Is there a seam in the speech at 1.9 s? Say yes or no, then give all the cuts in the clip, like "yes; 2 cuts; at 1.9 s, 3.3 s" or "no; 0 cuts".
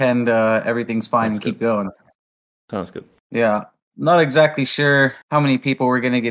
no; 2 cuts; at 3.2 s, 5.2 s